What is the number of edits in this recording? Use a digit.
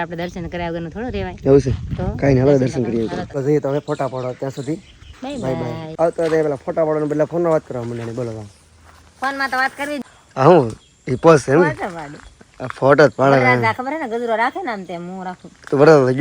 3